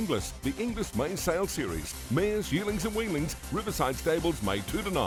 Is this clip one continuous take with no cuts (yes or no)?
yes